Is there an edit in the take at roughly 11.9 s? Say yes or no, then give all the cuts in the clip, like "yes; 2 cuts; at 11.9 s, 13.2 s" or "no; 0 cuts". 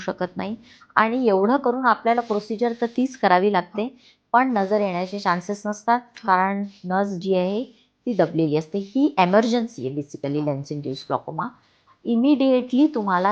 no; 0 cuts